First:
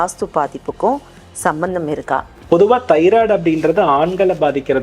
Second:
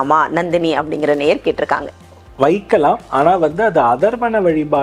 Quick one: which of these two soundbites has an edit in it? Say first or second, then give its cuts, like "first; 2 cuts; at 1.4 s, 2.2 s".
first; 1 cut; at 2.3 s